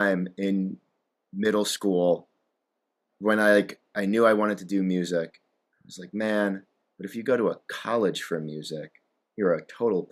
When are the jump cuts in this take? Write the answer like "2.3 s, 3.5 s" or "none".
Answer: none